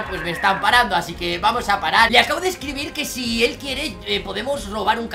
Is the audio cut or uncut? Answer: cut